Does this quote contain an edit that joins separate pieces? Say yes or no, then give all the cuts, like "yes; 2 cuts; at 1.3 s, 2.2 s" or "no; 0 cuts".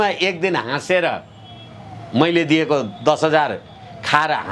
no; 0 cuts